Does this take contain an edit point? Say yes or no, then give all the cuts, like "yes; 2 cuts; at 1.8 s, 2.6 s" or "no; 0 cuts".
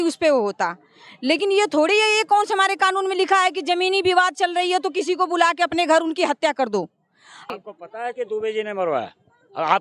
yes; 1 cut; at 7.5 s